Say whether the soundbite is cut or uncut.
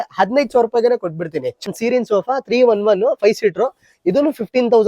cut